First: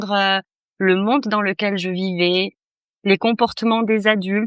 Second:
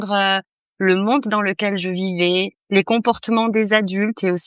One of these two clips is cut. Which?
second; 1 cut; at 2.6 s

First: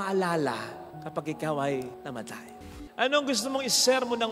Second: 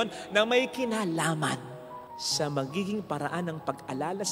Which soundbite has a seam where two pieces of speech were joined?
first; 1 cut; at 2.7 s

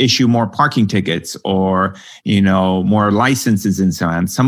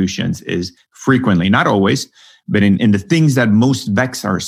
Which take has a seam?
second; 1 cut; at 2.8 s

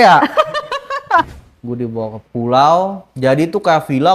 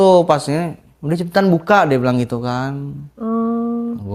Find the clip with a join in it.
first; 2 cuts; at 1.3 s, 3.0 s

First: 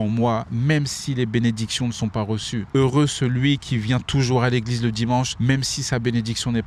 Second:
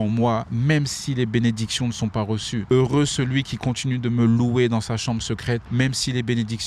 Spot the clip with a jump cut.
second; 2 cuts; at 2.6 s, 5.7 s

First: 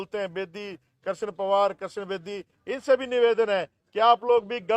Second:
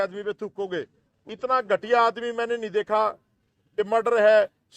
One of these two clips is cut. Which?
second; 2 cuts; at 1.1 s, 3.6 s

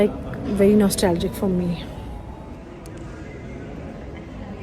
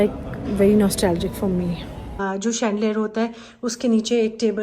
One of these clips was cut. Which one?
second; 1 cut; at 2.2 s

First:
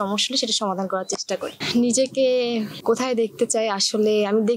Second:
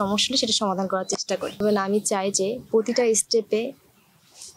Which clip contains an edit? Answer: second; 1 cut; at 1.6 s

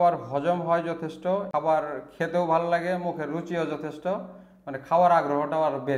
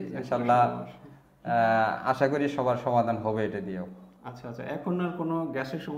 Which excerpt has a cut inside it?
first; 1 cut; at 1.5 s

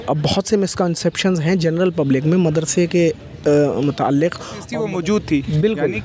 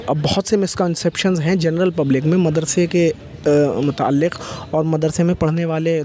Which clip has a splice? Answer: first; 1 cut; at 4.7 s

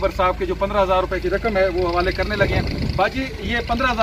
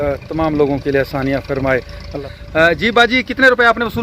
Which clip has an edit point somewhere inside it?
second; 1 cut; at 2.1 s

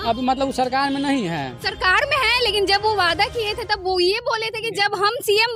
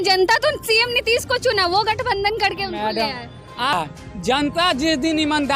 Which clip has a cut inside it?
second; 1 cut; at 3.7 s

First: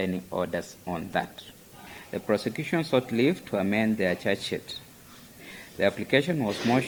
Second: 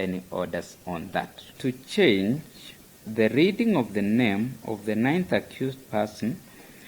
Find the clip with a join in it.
second; 1 cut; at 1.4 s

